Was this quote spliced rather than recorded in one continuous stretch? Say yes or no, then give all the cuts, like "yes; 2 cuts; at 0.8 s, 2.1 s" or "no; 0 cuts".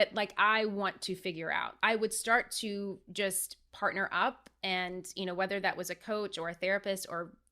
yes; 1 cut; at 1.7 s